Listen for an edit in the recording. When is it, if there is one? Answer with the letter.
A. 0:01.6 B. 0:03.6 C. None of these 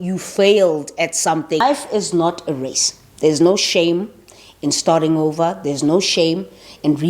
A